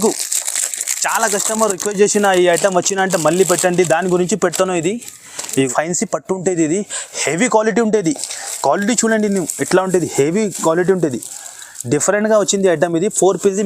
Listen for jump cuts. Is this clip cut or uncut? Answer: cut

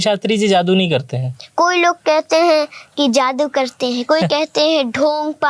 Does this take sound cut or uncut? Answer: uncut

